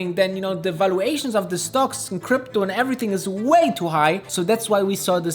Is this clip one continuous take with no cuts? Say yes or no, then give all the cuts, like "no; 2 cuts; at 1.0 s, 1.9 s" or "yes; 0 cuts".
no; 1 cut; at 4.3 s